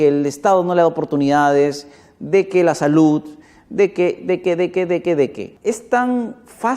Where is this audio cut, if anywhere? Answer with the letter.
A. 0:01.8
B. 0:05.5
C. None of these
B